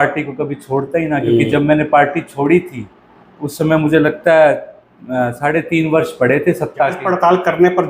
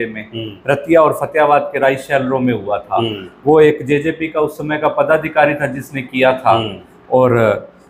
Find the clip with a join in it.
first; 1 cut; at 7.0 s

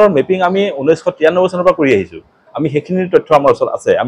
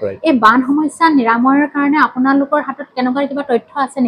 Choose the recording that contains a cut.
first; 1 cut; at 2.1 s

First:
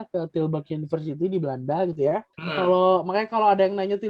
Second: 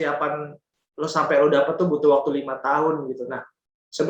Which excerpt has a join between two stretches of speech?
first; 1 cut; at 2.4 s

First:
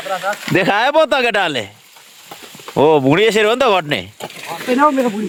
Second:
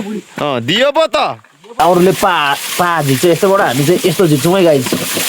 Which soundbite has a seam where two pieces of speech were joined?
second; 1 cut; at 1.8 s

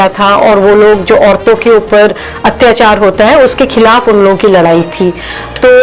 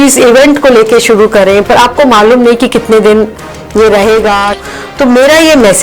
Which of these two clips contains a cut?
second; 1 cut; at 4.5 s

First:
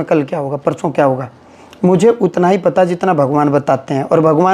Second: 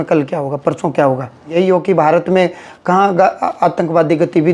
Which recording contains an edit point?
second; 1 cut; at 1.5 s

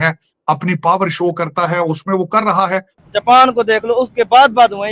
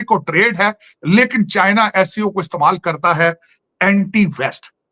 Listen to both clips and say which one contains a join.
first; 1 cut; at 3.0 s

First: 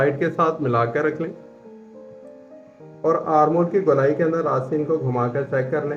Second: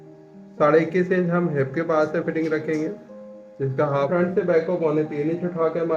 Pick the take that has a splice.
second; 1 cut; at 3.9 s

